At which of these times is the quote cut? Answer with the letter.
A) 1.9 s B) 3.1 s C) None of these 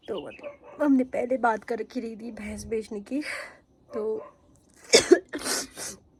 C